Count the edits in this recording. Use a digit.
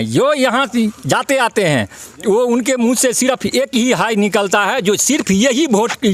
0